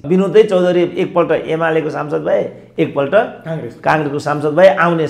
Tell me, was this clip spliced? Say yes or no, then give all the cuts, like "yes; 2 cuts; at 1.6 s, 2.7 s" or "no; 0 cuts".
no; 0 cuts